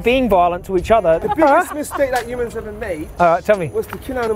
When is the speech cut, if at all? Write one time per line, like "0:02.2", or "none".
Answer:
0:01.2
0:03.1